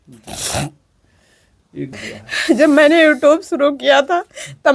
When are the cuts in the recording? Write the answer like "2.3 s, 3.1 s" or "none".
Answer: 1.9 s